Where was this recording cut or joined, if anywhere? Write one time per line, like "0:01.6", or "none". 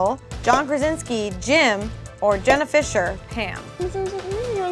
0:03.8